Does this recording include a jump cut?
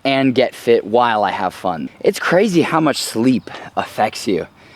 yes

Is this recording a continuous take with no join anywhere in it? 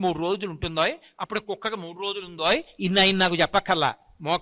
yes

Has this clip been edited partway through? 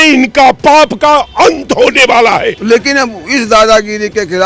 yes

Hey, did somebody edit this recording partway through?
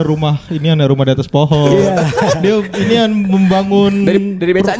no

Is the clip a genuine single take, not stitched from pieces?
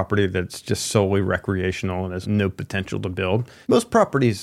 no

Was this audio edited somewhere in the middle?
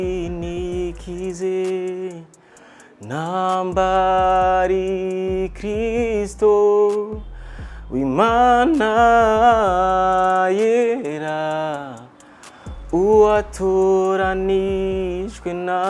no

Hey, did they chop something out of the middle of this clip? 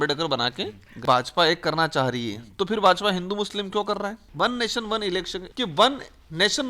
yes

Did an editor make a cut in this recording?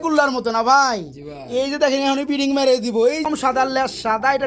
yes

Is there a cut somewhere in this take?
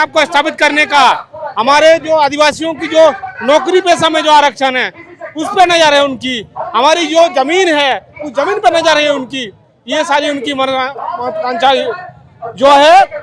no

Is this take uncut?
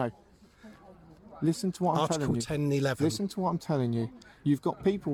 yes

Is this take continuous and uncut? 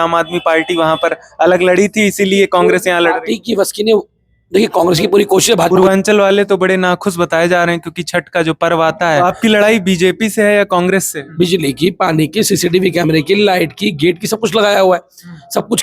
no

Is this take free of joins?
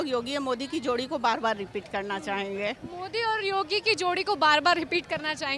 yes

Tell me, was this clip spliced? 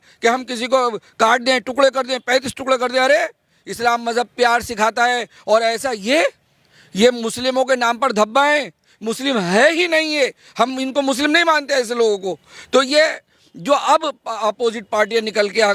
no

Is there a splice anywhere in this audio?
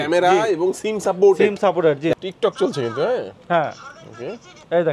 yes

